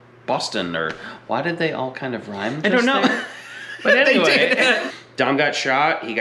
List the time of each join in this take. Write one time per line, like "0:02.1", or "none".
0:04.9